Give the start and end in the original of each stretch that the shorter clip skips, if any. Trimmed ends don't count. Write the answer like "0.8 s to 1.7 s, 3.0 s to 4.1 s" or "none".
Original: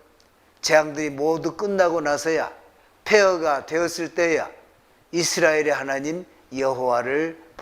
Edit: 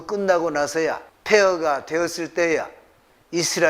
2.6 s to 2.9 s